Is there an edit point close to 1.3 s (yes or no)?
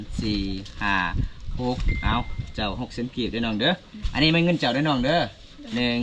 no